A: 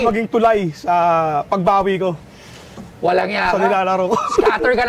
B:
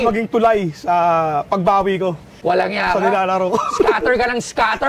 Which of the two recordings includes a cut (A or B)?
B